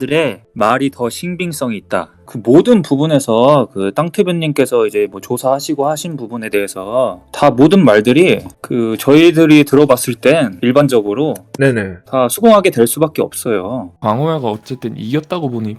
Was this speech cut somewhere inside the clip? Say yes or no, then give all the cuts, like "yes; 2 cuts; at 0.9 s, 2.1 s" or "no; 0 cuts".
yes; 2 cuts; at 10.5 s, 13.9 s